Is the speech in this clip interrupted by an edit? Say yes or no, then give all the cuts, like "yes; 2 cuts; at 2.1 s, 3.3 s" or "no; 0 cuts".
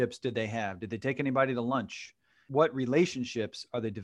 yes; 1 cut; at 2.4 s